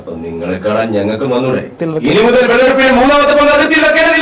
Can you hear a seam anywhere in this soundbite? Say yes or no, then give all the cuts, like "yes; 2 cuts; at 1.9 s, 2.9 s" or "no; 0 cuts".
yes; 1 cut; at 1.8 s